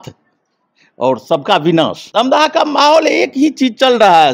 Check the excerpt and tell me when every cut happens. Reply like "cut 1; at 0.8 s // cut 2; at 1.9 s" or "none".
cut 1; at 2.0 s